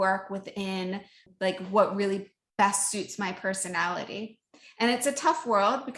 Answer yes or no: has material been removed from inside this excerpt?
yes